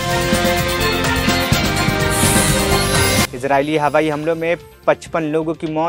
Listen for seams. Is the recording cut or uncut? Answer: cut